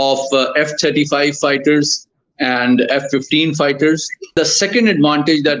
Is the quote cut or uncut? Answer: cut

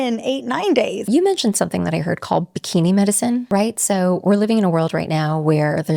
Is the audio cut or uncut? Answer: cut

